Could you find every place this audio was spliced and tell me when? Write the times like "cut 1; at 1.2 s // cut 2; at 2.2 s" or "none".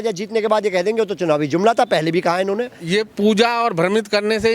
cut 1; at 2.8 s